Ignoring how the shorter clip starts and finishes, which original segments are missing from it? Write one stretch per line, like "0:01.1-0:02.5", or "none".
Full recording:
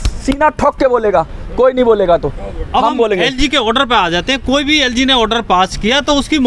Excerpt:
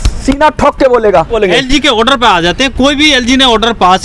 0:01.3-0:03.0